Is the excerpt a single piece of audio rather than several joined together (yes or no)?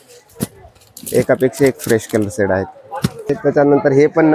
no